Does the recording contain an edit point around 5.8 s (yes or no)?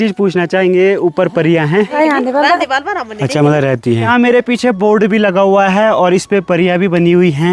no